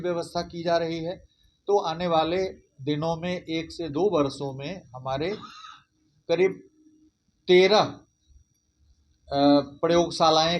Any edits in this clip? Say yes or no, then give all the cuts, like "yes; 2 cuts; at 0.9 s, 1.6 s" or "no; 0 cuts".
no; 0 cuts